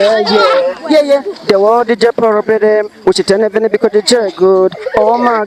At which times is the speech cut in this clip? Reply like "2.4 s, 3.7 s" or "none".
none